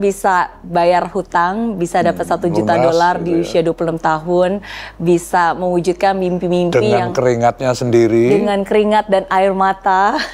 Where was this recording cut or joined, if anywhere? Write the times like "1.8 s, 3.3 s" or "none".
none